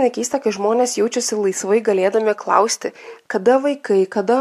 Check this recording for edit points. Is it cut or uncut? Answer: uncut